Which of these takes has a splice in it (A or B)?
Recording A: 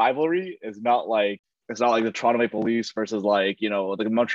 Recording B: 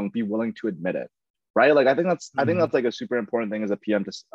A